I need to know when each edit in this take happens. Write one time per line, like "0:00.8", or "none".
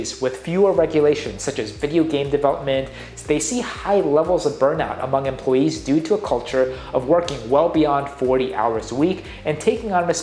none